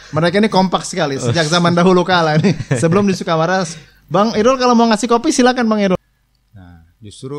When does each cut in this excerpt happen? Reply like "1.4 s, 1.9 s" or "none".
5.9 s